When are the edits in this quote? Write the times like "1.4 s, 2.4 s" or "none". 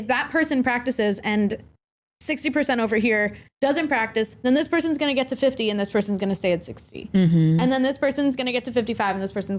none